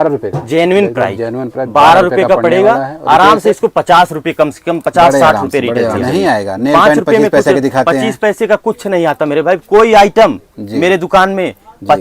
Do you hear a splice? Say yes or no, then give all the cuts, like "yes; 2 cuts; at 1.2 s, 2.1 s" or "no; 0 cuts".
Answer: yes; 1 cut; at 6.0 s